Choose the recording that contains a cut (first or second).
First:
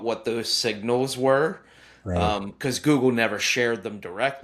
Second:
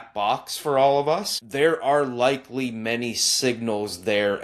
second